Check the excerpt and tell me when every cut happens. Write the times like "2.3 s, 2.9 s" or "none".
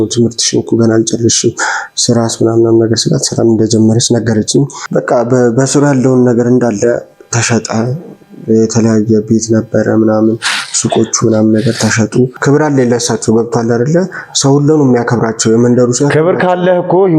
4.8 s, 12.4 s